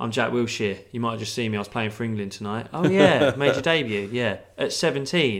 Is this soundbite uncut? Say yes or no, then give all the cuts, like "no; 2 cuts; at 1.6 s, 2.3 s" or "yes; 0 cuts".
yes; 0 cuts